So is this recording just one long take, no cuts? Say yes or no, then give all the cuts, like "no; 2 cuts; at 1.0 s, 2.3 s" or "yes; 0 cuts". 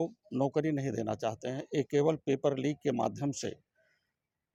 yes; 0 cuts